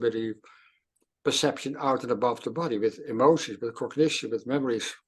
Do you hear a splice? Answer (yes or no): no